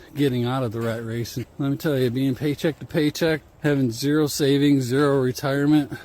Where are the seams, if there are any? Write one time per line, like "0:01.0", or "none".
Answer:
0:01.4
0:03.5